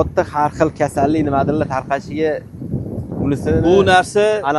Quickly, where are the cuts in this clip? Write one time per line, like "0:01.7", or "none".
none